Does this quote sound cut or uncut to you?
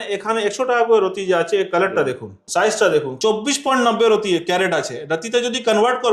cut